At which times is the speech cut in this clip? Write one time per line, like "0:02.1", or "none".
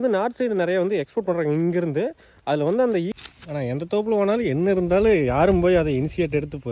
0:03.1